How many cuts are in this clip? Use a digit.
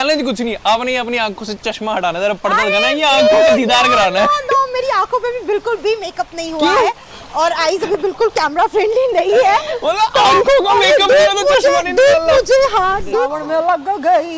1